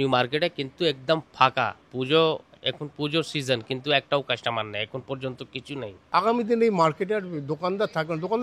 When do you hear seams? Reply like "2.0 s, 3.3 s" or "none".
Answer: 6.0 s